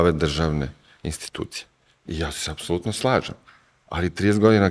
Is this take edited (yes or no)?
no